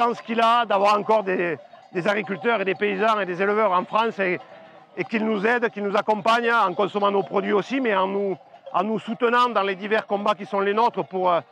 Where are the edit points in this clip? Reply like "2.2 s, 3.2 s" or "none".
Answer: none